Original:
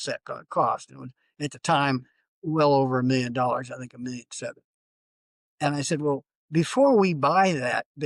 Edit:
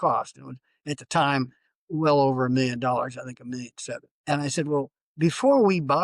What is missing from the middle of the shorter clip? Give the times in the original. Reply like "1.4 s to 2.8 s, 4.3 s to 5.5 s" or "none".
4.6 s to 5.4 s